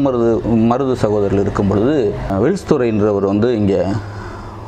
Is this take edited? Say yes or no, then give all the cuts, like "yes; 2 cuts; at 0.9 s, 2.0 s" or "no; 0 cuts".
yes; 1 cut; at 2.3 s